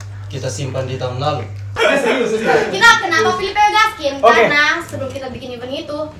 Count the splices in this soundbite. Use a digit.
1